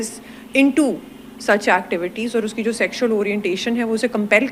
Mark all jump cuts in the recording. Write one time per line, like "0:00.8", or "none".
none